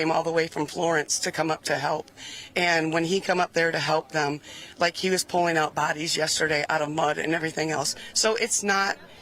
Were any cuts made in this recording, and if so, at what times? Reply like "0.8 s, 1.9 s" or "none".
none